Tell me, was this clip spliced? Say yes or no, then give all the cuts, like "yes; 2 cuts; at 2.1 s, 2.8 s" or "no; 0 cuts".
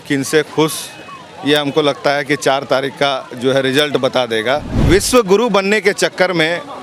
yes; 1 cut; at 4.8 s